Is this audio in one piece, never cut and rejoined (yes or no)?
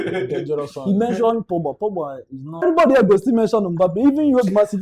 no